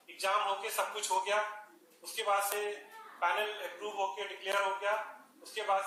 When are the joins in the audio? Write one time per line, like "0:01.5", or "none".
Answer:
none